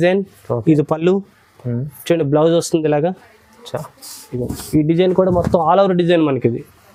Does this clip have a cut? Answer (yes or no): no